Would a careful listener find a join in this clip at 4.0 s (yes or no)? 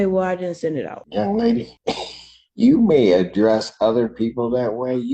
no